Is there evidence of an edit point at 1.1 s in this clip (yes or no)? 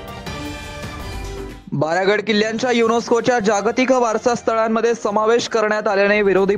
yes